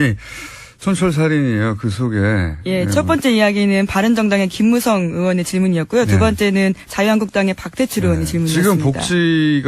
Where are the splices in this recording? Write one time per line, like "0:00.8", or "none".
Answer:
0:08.2